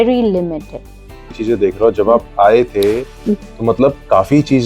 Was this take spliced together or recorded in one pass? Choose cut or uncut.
cut